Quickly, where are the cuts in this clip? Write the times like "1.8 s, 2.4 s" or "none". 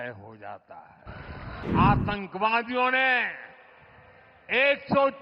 1.6 s